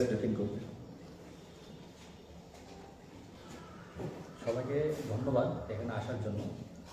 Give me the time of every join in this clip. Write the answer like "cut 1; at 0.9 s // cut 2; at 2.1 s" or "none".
none